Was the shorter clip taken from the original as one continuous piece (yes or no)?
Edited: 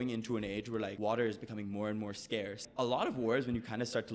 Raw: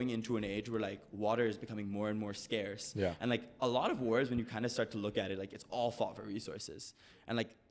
no